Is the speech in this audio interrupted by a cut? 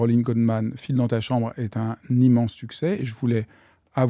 no; 0 cuts

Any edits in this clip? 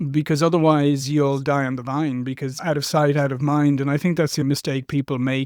yes; 2 cuts; at 2.6 s, 4.4 s

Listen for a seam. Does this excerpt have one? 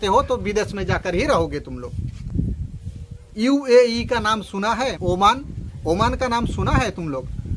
no; 0 cuts

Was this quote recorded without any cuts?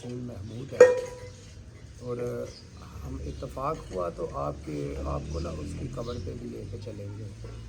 yes; 0 cuts

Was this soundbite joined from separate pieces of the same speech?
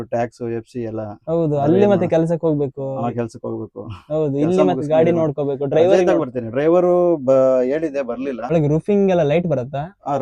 yes; 1 cut; at 8.5 s

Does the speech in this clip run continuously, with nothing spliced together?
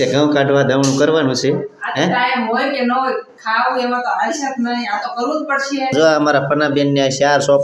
no; 1 cut; at 5.9 s

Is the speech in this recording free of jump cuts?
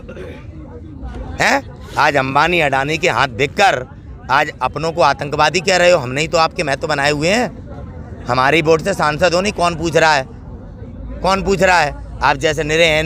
yes; 0 cuts

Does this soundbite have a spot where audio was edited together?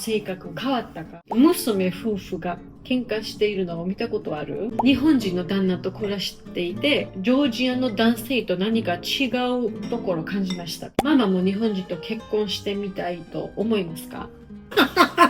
yes; 3 cuts; at 1.2 s, 4.7 s, 11.0 s

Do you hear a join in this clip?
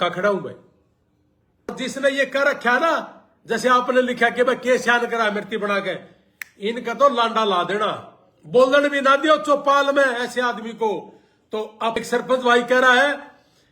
yes; 2 cuts; at 1.7 s, 12.0 s

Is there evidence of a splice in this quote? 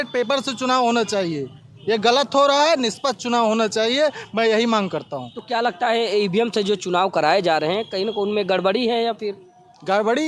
no; 0 cuts

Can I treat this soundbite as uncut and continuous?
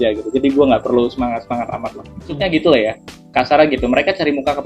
no; 1 cut; at 2.4 s

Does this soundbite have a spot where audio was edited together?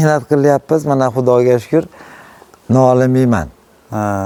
no; 0 cuts

